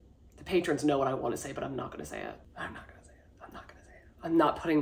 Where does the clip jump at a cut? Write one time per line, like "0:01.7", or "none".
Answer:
0:02.5